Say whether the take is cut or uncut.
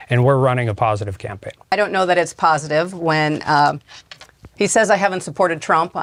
uncut